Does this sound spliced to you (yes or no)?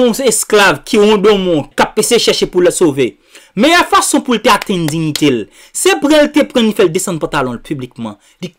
yes